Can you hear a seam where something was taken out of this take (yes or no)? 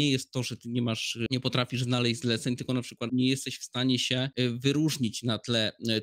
yes